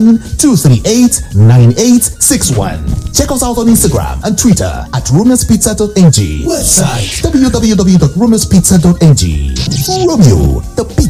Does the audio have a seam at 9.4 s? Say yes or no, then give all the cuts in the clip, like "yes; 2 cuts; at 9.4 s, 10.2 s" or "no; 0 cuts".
no; 0 cuts